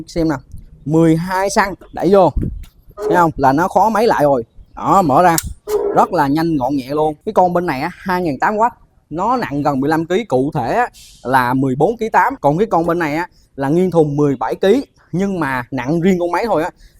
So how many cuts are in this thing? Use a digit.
3